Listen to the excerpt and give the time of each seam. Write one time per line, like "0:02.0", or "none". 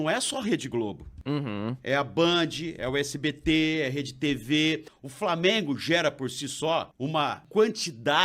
0:01.1
0:04.9
0:07.3